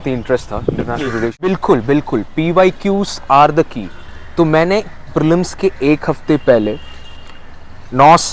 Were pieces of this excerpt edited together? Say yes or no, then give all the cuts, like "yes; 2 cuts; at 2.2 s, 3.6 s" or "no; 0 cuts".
yes; 1 cut; at 1.5 s